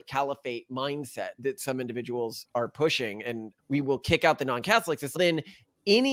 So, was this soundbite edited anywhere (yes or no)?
no